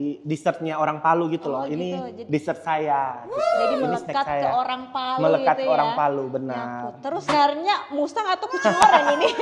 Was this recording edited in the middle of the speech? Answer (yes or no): yes